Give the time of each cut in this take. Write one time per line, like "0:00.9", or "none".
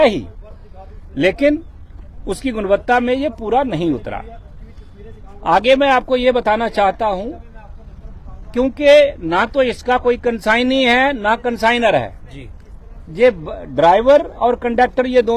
none